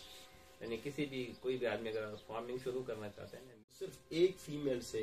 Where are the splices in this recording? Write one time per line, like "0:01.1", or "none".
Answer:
0:03.7